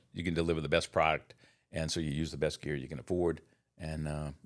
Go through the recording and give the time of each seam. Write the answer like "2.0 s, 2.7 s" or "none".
none